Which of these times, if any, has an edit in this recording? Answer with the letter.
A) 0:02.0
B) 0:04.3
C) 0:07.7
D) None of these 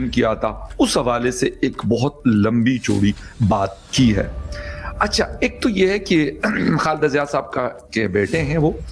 D